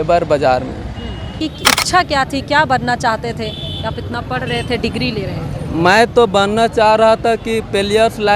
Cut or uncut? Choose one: cut